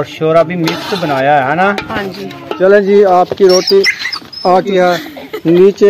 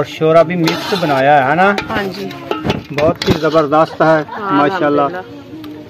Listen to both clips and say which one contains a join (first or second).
first